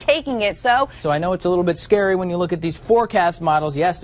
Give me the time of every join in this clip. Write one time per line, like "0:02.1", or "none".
0:01.0